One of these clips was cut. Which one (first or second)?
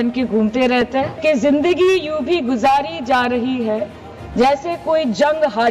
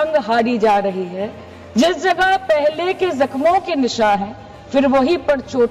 first